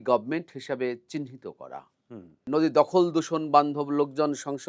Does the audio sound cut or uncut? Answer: cut